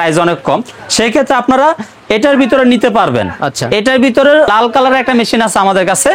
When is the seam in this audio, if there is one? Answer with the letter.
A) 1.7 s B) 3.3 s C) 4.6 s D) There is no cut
D